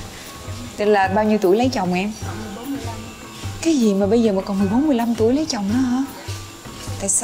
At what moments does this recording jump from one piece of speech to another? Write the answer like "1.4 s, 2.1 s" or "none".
none